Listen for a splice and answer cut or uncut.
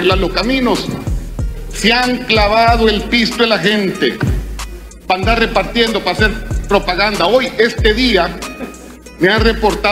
uncut